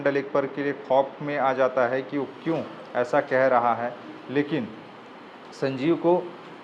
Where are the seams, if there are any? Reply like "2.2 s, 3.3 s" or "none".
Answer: none